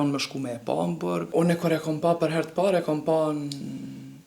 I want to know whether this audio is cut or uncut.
cut